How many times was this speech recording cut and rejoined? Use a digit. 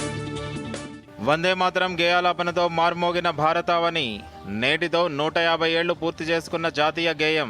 0